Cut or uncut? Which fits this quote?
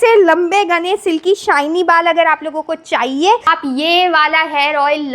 cut